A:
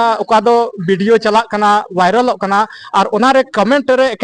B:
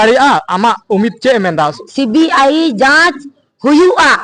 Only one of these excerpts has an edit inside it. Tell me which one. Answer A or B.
B